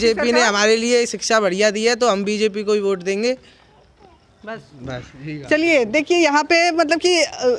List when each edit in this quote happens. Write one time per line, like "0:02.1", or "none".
none